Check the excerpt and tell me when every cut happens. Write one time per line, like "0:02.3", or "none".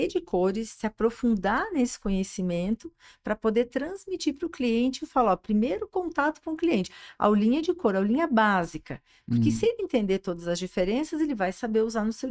none